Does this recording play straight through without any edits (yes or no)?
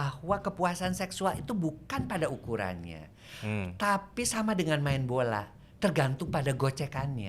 yes